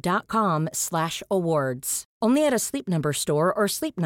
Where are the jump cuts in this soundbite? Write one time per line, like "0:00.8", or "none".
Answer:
none